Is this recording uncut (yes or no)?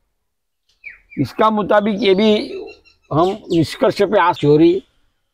no